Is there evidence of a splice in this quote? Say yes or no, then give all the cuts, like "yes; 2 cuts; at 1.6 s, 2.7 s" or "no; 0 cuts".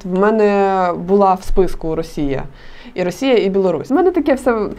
yes; 1 cut; at 3.9 s